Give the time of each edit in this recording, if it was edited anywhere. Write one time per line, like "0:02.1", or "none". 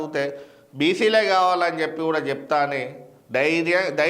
none